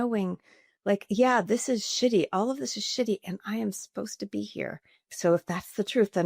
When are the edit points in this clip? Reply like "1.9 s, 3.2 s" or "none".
5.1 s